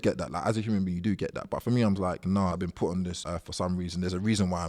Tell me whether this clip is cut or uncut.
cut